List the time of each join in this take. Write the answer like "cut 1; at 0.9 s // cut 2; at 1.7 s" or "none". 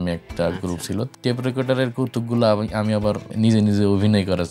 cut 1; at 1.1 s // cut 2; at 3.3 s